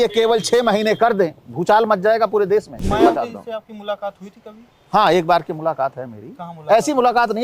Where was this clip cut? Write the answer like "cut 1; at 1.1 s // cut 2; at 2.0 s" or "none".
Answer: cut 1; at 1.5 s // cut 2; at 2.8 s

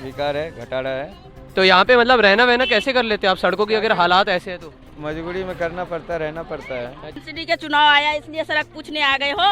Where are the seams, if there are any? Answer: cut 1; at 7.2 s

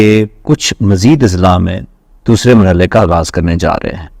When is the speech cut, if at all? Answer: none

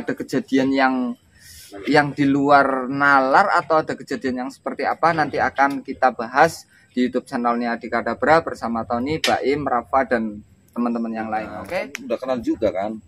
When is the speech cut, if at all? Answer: cut 1; at 11.6 s

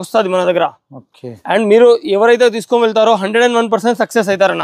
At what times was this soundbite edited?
none

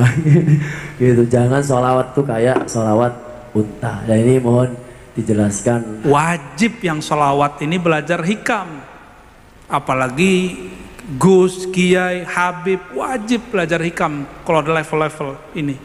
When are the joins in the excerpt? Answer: cut 1; at 5.9 s

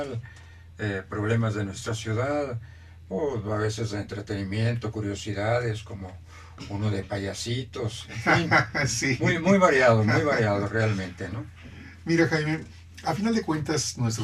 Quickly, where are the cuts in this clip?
cut 1; at 6.6 s

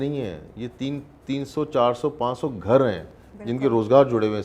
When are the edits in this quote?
none

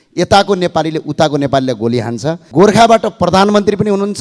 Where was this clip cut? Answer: cut 1; at 2.4 s

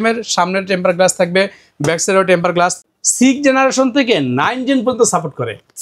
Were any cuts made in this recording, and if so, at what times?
cut 1; at 2.8 s

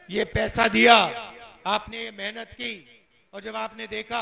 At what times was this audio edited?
none

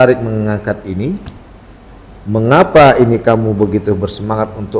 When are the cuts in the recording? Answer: none

